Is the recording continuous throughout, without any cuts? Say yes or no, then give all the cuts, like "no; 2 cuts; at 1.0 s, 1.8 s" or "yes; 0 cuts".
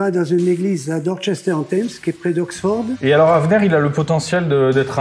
no; 1 cut; at 3.0 s